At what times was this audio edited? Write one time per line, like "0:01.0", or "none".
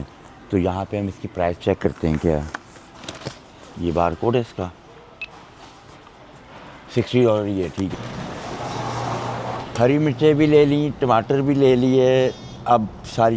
0:07.9